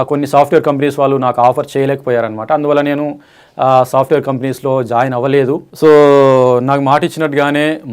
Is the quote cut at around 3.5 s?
no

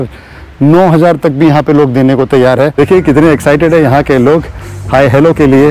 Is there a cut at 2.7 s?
yes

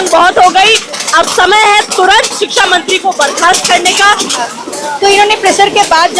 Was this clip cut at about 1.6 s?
no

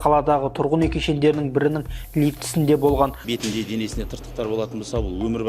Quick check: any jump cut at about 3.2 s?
yes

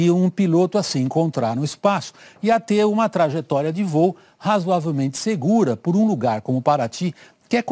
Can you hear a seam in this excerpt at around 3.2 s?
no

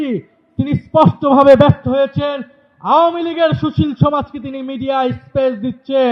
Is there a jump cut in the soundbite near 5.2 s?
no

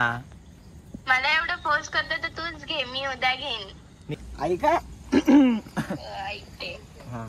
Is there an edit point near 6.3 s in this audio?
no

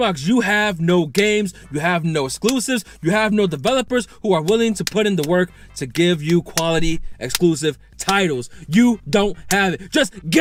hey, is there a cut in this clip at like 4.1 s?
no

